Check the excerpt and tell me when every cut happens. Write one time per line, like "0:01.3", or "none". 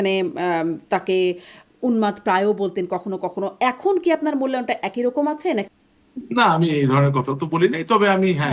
0:05.7